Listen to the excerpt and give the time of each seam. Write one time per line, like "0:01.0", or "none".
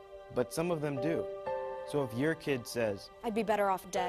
0:02.1